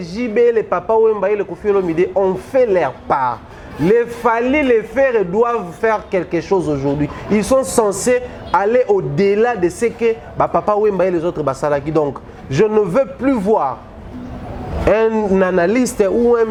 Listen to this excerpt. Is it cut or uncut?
uncut